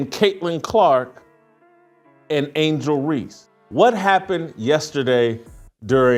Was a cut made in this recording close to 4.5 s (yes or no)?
no